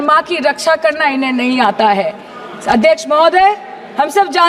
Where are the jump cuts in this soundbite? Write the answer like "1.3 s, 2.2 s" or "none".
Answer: none